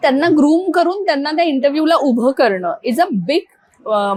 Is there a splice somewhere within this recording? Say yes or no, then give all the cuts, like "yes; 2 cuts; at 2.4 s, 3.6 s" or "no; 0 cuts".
no; 0 cuts